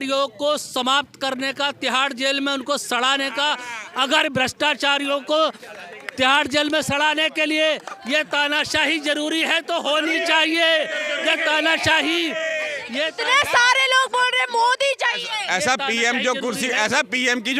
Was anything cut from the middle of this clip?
no; 0 cuts

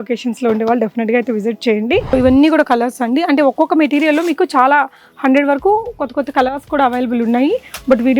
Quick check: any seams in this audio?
yes; 1 cut; at 2.1 s

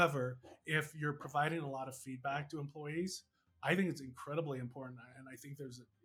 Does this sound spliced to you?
no; 0 cuts

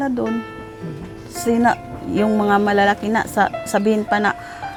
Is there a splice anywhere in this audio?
no; 0 cuts

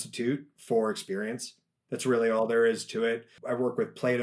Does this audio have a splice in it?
yes; 1 cut; at 3.3 s

